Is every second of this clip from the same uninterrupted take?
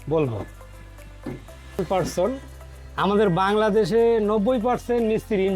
no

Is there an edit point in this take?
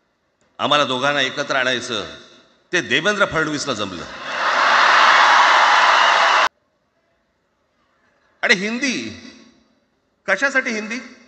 yes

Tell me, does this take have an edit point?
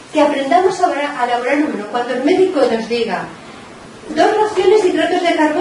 no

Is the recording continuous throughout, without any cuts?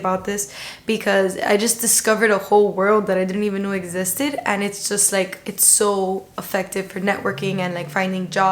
yes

